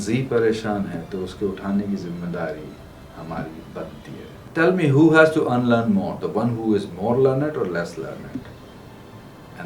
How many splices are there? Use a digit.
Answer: 1